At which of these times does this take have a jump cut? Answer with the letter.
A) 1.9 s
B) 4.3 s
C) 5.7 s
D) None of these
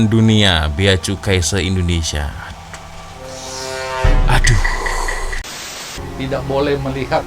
C